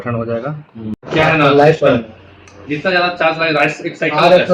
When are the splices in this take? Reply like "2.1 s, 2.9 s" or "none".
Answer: 0.9 s